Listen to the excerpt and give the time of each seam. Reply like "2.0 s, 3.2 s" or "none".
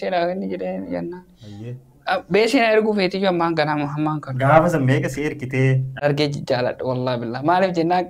6.0 s